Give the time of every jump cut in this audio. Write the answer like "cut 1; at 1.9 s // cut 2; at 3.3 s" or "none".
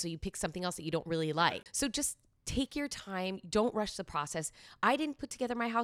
cut 1; at 1.4 s